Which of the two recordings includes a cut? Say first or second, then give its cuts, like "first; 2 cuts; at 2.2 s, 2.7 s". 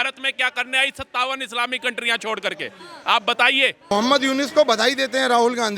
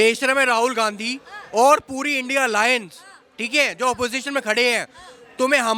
first; 1 cut; at 3.9 s